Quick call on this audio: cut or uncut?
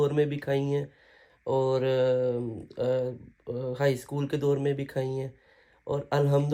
uncut